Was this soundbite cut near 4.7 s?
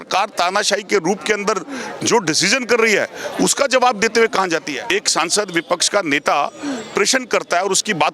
yes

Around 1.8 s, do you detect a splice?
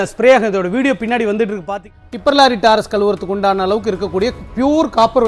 yes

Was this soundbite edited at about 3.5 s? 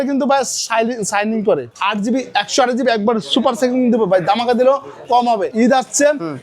no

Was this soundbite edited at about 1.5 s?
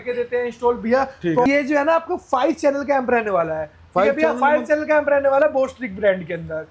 yes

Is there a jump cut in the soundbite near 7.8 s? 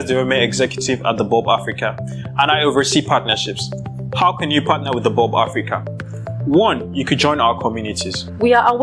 yes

